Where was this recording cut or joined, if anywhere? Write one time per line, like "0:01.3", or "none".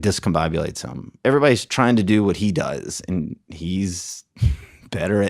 0:01.2

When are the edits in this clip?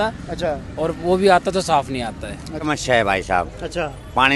0:02.7

